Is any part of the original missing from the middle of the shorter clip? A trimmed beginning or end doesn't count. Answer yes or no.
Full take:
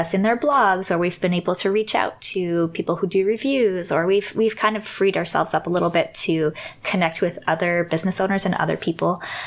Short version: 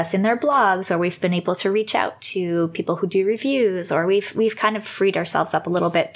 no